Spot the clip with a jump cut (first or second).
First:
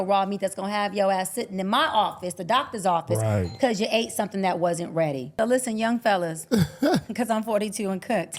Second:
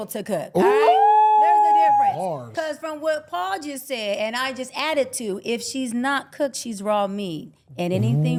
first